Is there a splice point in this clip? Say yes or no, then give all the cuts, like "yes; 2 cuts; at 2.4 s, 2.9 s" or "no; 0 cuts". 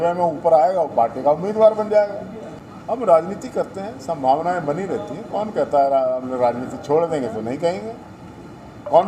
yes; 1 cut; at 2.7 s